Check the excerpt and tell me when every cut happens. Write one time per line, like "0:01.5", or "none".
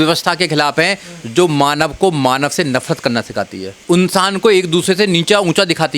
0:03.8